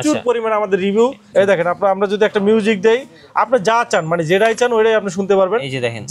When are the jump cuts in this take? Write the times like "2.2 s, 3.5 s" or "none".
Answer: 1.2 s